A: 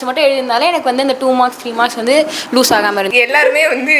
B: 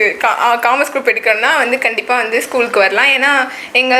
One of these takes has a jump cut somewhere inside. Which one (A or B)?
A